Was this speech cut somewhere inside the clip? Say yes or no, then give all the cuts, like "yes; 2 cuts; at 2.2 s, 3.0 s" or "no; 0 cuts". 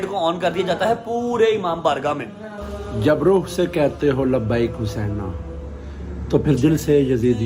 yes; 1 cut; at 2.5 s